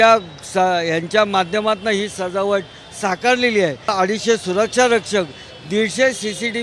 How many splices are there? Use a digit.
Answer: 1